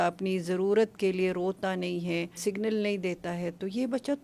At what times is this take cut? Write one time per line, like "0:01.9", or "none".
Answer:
0:02.4